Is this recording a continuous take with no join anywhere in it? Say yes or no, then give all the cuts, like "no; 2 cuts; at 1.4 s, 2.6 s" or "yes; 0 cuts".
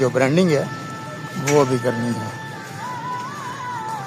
yes; 0 cuts